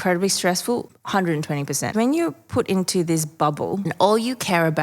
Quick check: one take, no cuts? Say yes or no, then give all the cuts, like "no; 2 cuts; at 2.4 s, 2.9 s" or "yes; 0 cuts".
no; 2 cuts; at 1.5 s, 3.9 s